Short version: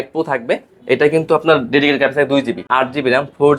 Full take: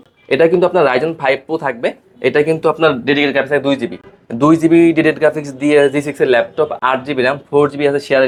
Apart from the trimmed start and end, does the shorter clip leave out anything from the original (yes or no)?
yes